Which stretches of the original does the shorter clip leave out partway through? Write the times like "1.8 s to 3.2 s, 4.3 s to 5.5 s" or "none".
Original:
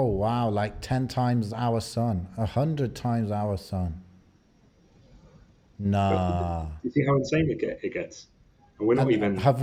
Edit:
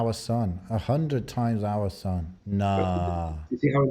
4.0 s to 5.7 s